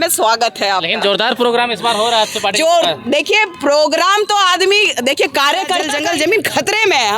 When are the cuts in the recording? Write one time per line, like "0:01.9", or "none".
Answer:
0:05.9